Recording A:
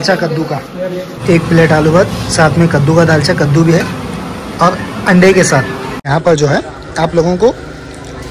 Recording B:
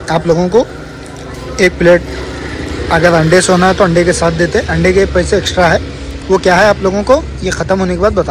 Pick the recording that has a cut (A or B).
A